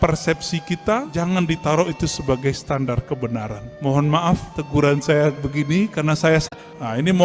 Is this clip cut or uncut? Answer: cut